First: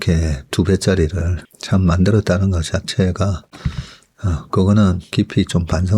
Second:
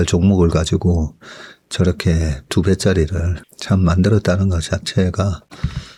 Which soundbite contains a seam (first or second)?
first